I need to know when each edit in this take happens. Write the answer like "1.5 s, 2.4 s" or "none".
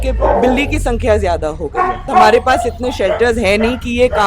2.1 s